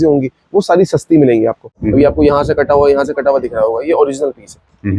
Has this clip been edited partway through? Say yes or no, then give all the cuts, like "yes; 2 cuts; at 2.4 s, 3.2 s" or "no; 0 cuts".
yes; 1 cut; at 1.7 s